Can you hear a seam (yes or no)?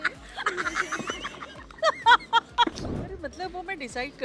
yes